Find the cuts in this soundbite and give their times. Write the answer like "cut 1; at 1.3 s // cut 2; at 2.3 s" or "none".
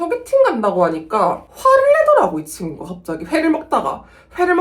none